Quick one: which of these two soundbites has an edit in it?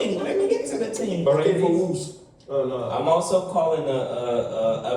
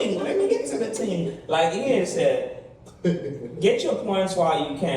first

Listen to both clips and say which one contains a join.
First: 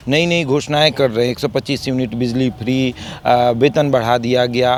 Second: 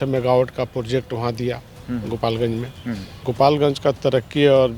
second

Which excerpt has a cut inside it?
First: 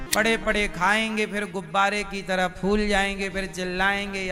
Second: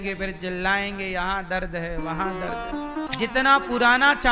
second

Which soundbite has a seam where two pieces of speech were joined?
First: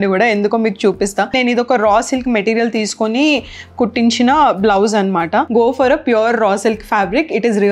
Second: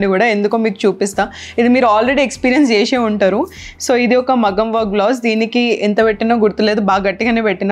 first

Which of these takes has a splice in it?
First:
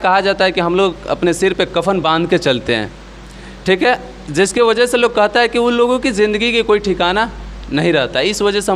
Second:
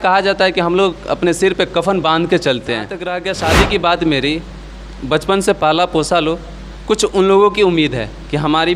second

